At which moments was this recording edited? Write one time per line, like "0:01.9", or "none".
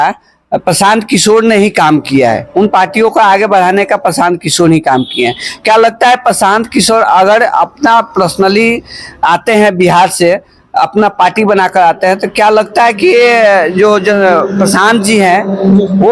none